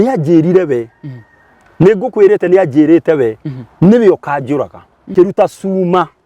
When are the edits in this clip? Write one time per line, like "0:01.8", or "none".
0:05.1

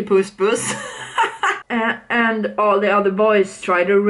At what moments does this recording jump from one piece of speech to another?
0:01.6

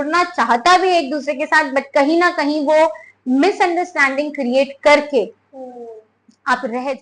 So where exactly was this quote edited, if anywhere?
none

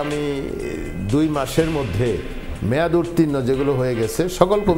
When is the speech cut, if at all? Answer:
none

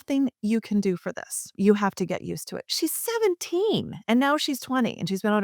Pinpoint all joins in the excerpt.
0:01.4

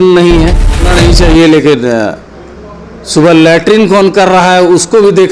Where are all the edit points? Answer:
0:00.9

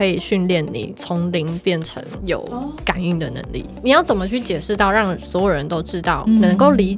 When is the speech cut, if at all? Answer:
0:00.9
0:02.4
0:03.7

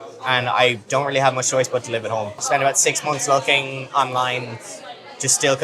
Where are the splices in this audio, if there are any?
0:02.4

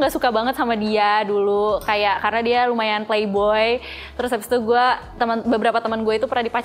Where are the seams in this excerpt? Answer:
none

